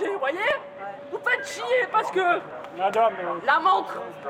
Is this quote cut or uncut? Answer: uncut